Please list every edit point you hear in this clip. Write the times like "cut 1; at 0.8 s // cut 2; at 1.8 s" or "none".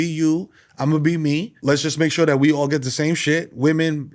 cut 1; at 1.5 s